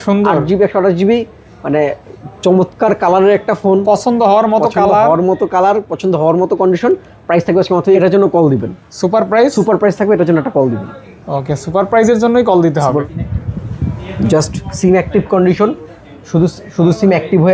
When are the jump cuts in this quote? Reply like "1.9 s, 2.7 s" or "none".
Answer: 8.0 s, 12.8 s